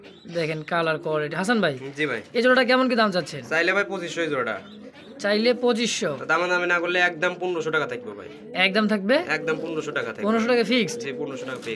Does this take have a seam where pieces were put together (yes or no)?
no